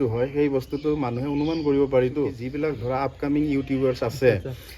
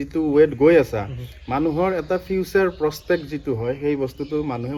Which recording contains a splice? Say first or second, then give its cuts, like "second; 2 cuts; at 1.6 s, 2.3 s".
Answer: first; 1 cut; at 2.4 s